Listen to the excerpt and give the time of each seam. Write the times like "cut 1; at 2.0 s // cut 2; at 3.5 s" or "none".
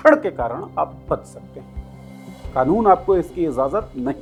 none